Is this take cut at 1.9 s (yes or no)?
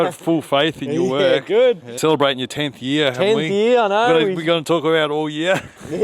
yes